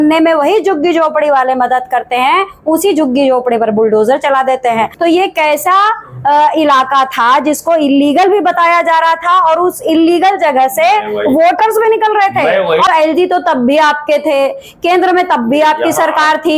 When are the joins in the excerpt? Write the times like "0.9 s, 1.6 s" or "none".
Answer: 4.9 s, 12.9 s